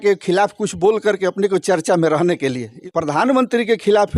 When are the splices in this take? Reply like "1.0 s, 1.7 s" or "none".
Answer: 2.8 s